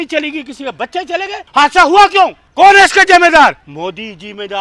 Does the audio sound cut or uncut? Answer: cut